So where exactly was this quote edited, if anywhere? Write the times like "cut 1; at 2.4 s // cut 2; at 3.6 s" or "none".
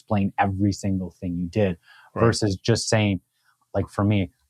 none